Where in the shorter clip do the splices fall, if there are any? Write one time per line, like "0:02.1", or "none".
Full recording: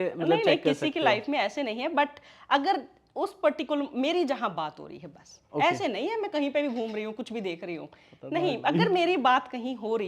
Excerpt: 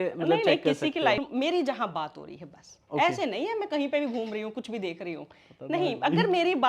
0:01.2